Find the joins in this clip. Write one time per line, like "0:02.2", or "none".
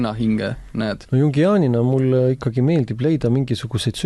0:01.0